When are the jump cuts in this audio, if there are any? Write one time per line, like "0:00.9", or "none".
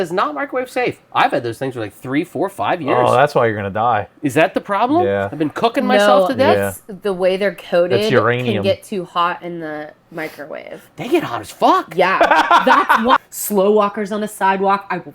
0:13.2

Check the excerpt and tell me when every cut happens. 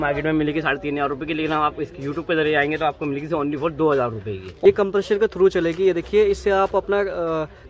0:04.4

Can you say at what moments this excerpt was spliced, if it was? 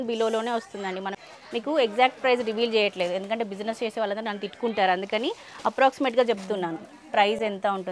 0:01.2

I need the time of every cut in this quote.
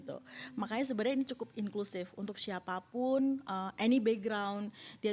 none

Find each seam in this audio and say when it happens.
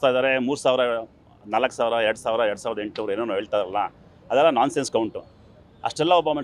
none

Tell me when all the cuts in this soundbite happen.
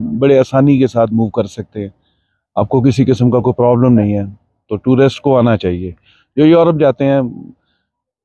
none

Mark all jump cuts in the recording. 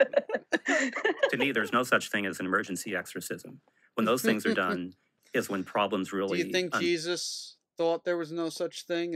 0:01.3

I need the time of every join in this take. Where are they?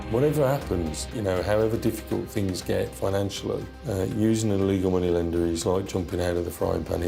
none

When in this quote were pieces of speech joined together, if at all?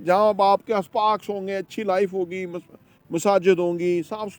none

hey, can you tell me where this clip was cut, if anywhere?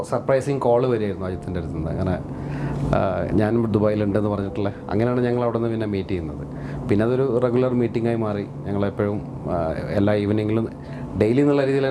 none

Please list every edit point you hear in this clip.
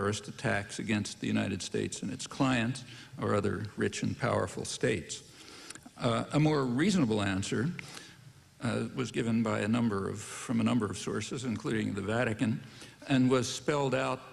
none

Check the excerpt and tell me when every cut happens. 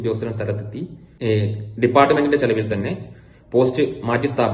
0:01.0

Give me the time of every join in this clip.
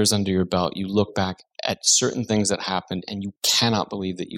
none

